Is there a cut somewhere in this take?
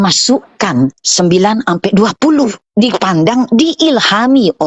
yes; 2 cuts; at 1.0 s, 2.6 s

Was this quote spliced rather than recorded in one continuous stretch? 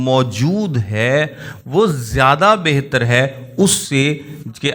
no; 0 cuts

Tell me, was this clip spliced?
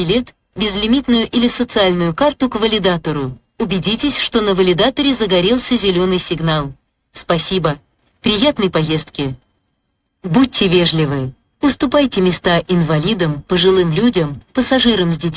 no; 0 cuts

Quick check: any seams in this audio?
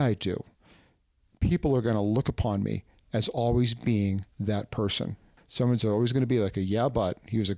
yes; 1 cut; at 5.4 s

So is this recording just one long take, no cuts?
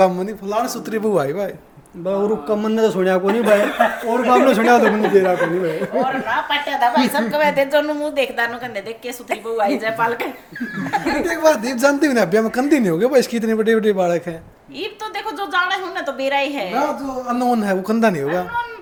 yes; 0 cuts

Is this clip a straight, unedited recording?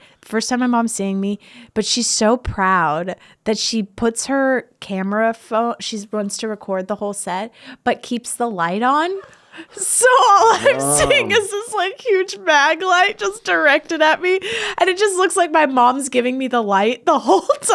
yes; 0 cuts

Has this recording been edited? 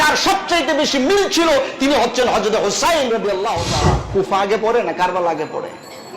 yes; 1 cut; at 4.0 s

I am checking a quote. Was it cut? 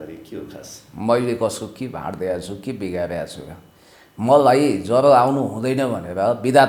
no; 0 cuts

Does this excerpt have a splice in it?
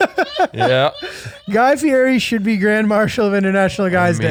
no; 0 cuts

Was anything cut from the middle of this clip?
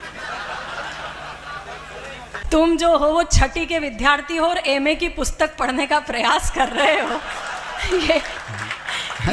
no; 0 cuts

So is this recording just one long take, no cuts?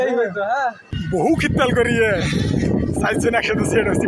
no; 1 cut; at 0.9 s

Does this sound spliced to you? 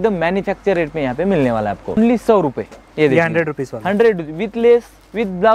yes; 1 cut; at 2.0 s

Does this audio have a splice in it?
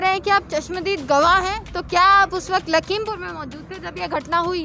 no; 0 cuts

